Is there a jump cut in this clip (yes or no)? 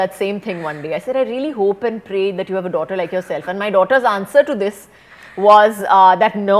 no